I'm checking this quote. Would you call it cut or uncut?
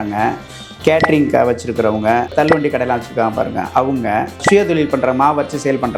uncut